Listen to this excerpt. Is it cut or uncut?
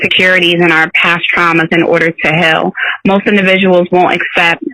uncut